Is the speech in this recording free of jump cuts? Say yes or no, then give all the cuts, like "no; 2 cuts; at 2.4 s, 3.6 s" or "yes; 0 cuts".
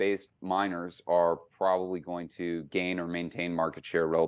yes; 0 cuts